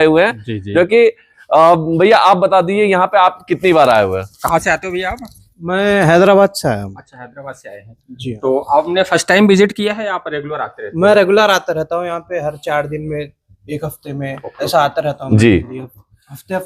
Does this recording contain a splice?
no; 0 cuts

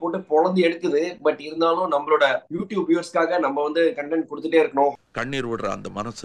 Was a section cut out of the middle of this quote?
no; 0 cuts

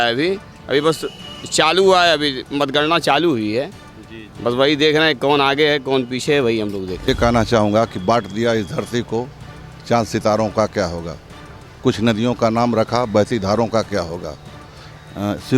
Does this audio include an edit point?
yes; 1 cut; at 7.1 s

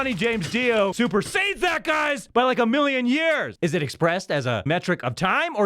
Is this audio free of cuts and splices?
no; 4 cuts; at 0.9 s, 2.2 s, 3.5 s, 4.6 s

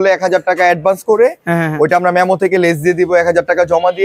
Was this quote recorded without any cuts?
yes; 0 cuts

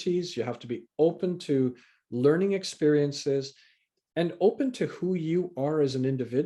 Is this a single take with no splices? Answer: yes; 0 cuts

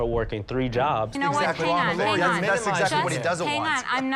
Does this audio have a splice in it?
yes; 1 cut; at 1.1 s

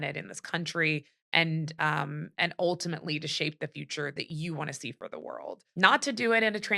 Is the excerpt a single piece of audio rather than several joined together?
no; 1 cut; at 5.6 s

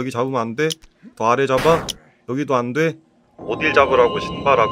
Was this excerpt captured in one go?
yes; 0 cuts

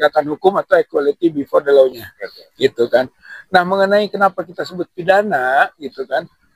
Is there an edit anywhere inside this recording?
no; 0 cuts

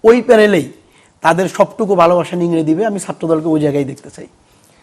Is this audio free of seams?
yes; 0 cuts

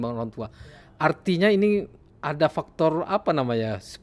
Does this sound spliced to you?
no; 0 cuts

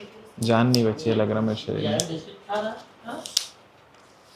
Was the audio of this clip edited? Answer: no; 0 cuts

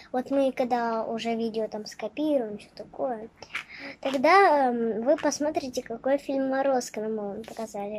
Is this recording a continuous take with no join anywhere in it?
yes; 0 cuts

